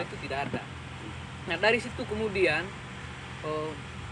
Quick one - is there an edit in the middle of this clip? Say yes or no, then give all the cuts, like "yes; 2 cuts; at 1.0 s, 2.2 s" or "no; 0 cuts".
no; 0 cuts